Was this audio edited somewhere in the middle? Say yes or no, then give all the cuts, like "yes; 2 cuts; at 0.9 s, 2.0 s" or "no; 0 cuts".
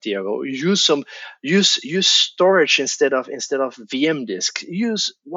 no; 0 cuts